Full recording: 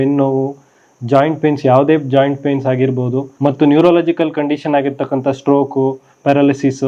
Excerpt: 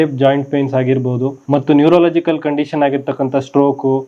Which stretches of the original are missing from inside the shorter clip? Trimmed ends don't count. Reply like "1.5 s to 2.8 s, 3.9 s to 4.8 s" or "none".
none